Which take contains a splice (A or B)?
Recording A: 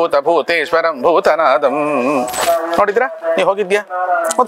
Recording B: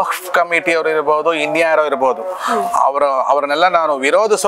A